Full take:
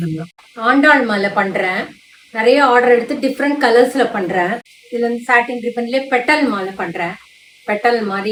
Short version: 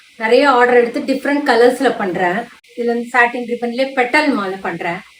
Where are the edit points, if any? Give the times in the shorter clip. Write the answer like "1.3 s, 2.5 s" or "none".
none

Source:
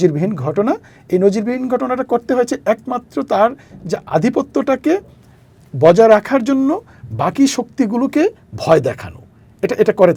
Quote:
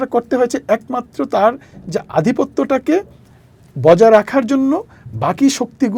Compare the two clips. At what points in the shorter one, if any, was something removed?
none

